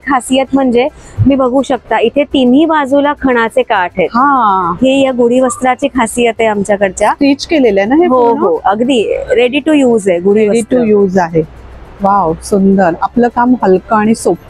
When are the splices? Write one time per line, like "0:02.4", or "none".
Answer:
none

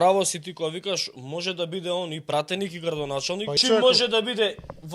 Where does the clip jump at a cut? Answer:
0:03.6

